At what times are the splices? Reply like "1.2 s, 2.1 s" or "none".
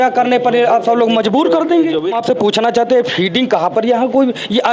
2.2 s